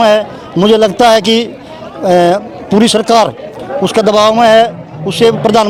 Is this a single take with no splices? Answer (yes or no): yes